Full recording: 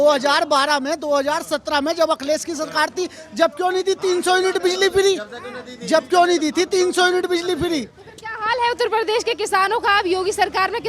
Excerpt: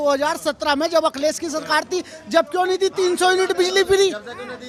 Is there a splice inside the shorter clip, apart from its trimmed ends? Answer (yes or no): no